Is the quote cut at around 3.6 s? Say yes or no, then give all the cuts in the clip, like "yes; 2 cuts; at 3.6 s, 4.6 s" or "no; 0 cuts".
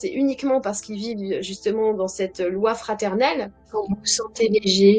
yes; 1 cut; at 3.6 s